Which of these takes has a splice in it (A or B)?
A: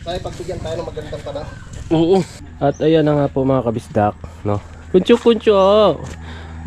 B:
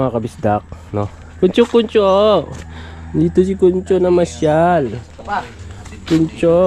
A